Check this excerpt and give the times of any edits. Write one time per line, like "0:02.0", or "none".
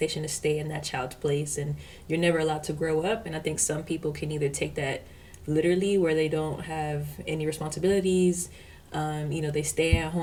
none